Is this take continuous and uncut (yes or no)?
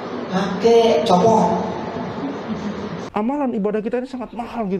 no